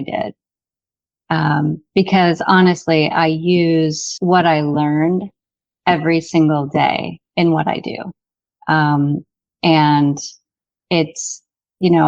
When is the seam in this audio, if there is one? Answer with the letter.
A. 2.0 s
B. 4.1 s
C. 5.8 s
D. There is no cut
B